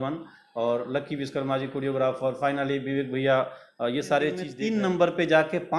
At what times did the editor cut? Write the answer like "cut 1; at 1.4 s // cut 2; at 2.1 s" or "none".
cut 1; at 4.5 s